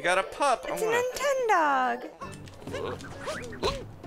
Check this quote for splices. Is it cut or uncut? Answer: cut